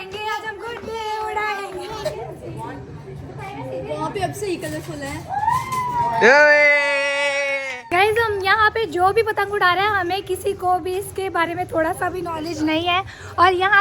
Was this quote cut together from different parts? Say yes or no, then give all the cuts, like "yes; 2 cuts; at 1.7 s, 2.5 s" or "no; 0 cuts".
yes; 2 cuts; at 2.1 s, 8.0 s